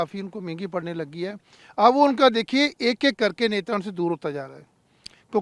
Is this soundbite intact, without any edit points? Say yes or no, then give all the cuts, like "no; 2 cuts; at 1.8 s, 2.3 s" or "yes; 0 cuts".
yes; 0 cuts